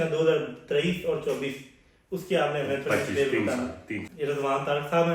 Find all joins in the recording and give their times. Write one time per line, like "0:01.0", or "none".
0:04.0